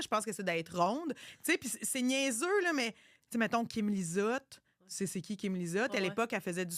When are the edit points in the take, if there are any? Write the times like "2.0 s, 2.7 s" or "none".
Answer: 1.3 s, 3.1 s